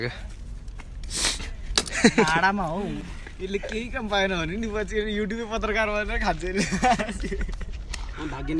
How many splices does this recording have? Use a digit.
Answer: 0